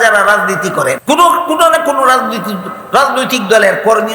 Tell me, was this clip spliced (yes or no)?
yes